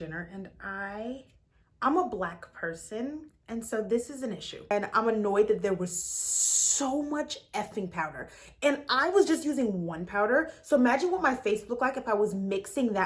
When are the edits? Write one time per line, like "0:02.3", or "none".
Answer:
0:04.7